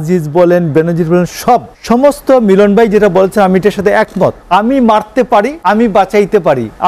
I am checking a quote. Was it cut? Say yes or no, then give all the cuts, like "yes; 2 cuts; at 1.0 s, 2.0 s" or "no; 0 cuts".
yes; 3 cuts; at 1.7 s, 4.4 s, 5.5 s